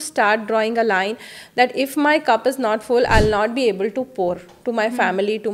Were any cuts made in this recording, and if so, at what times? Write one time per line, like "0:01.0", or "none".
none